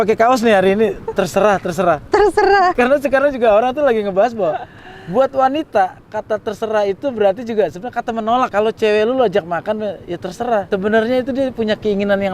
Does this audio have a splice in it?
yes; 3 cuts; at 2.7 s, 8.5 s, 10.7 s

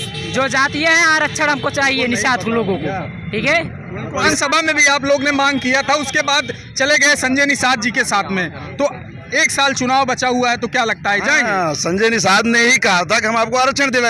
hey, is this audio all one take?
no; 1 cut; at 4.3 s

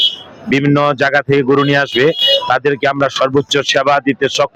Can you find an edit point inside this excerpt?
no; 0 cuts

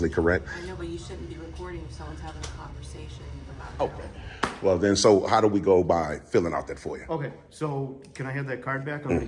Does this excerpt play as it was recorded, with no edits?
no; 1 cut; at 3.6 s

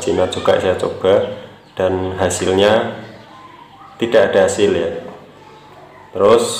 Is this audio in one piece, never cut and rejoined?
yes; 0 cuts

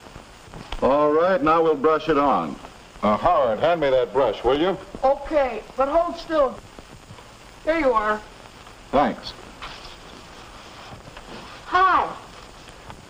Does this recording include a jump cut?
yes; 1 cut; at 7.1 s

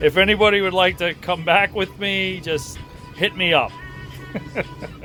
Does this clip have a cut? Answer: no; 0 cuts

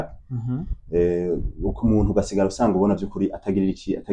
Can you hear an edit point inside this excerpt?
no; 0 cuts

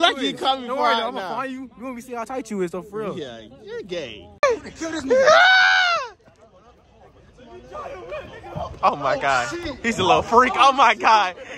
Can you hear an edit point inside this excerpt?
yes; 1 cut; at 4.4 s

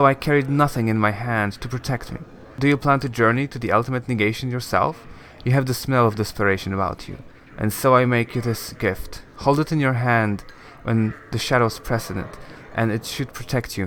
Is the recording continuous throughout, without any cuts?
yes; 0 cuts

